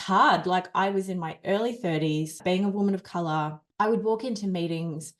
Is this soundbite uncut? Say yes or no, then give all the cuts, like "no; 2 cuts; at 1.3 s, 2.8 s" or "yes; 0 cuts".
no; 1 cut; at 3.6 s